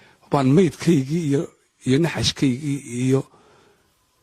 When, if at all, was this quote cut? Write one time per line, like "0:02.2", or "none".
none